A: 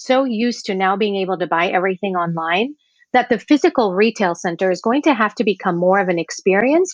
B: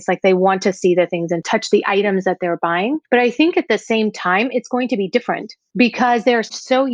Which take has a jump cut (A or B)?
B